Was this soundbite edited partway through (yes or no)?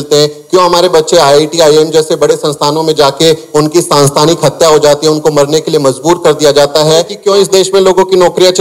yes